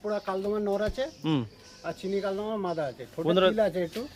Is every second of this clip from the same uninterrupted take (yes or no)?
yes